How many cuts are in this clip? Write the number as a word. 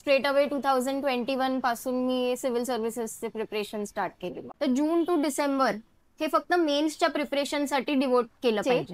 one